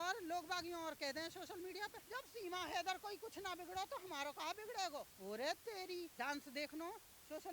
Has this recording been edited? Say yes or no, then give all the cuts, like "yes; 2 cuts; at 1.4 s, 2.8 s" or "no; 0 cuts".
yes; 3 cuts; at 2.0 s, 5.1 s, 6.1 s